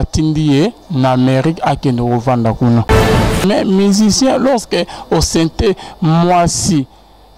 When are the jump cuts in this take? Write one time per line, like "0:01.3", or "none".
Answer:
0:03.4